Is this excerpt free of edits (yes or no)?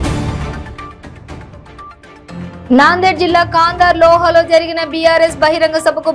no